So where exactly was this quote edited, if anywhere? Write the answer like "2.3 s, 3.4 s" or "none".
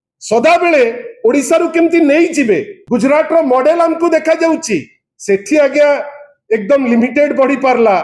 2.7 s